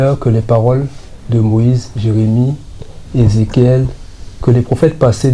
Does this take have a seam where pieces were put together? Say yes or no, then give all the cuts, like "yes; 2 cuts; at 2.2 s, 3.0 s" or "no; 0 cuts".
no; 0 cuts